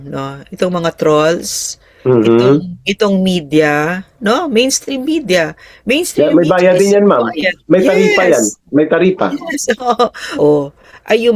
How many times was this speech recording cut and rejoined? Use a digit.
1